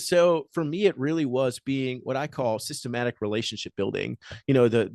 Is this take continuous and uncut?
yes; 0 cuts

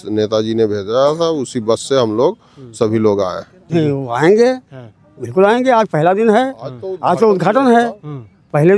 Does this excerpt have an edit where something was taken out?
yes; 1 cut; at 3.6 s

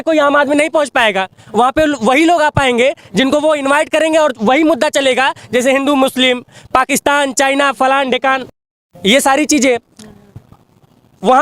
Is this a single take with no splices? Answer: yes; 0 cuts

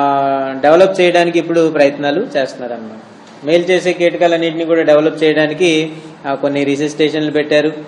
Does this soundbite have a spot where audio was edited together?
yes; 1 cut; at 3.1 s

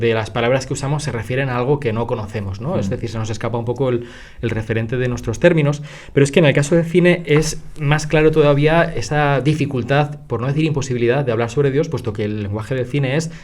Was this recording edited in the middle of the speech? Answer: no; 0 cuts

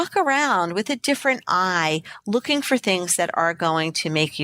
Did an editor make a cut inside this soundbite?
no; 0 cuts

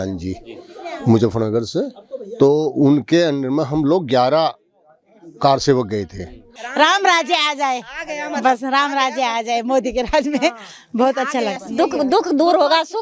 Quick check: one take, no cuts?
no; 2 cuts; at 6.6 s, 11.6 s

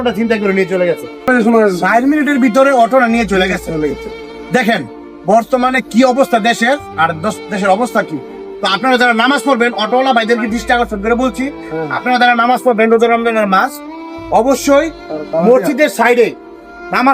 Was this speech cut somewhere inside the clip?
yes; 1 cut; at 1.3 s

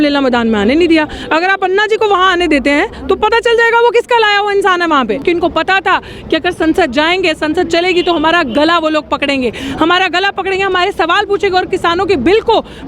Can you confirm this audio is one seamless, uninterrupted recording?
no; 1 cut; at 5.2 s

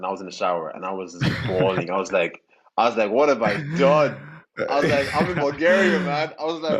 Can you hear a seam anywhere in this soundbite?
no; 0 cuts

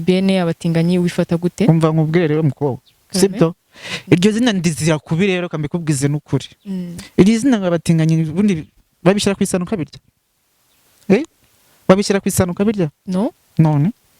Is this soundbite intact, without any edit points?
yes; 0 cuts

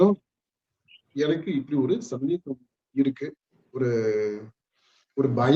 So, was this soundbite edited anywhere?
yes; 1 cut; at 1.0 s

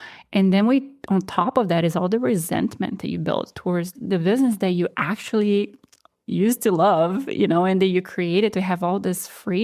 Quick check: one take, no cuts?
no; 1 cut; at 3.9 s

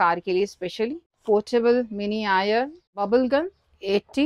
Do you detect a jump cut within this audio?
yes; 2 cuts; at 1.1 s, 3.1 s

